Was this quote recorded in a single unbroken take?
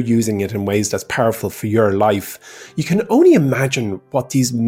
yes; 0 cuts

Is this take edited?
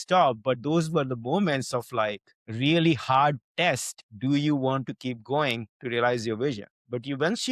no; 0 cuts

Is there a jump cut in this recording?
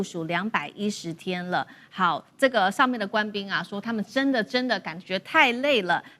no; 0 cuts

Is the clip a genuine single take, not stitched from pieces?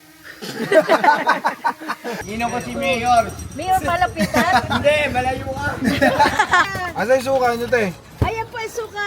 no; 2 cuts; at 2.2 s, 6.7 s

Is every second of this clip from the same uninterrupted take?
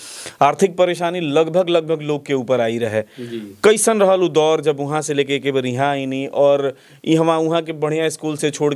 yes; 0 cuts

